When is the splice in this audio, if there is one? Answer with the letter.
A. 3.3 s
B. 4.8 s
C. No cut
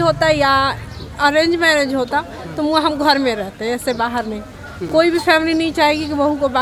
C